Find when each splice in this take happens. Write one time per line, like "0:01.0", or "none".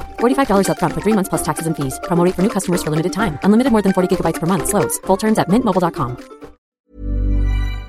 0:06.7